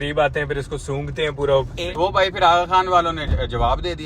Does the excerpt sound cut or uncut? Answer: cut